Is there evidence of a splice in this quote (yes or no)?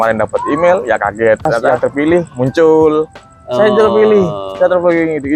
yes